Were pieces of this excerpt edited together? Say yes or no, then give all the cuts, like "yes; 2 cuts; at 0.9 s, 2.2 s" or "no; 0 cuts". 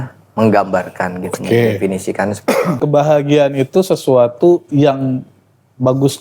yes; 1 cut; at 2.8 s